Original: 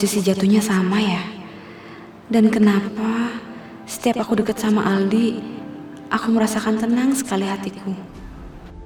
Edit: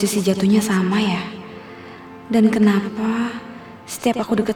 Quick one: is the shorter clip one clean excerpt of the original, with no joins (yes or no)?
yes